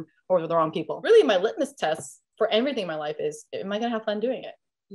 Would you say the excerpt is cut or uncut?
cut